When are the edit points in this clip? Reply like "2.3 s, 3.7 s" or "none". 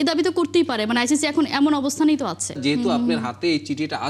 2.6 s